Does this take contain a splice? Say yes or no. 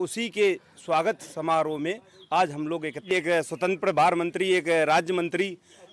yes